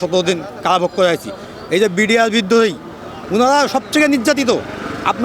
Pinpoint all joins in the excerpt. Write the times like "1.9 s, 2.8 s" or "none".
none